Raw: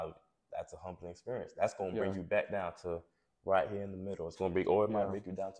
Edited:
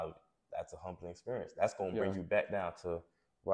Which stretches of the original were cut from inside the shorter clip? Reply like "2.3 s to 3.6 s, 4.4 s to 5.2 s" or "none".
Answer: none